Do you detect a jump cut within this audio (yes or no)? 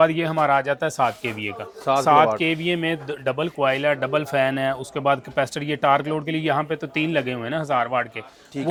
no